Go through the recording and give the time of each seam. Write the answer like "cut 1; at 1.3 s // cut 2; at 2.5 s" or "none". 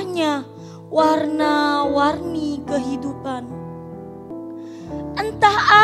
cut 1; at 4.3 s